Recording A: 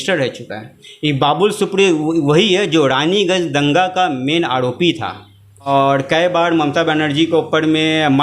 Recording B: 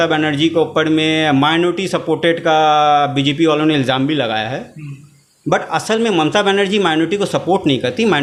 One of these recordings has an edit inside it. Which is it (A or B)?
A